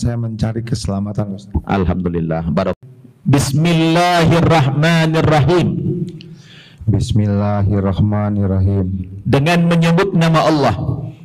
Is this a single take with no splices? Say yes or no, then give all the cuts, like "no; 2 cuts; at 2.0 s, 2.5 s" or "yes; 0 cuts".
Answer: no; 1 cut; at 2.8 s